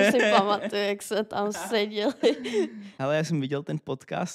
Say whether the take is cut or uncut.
cut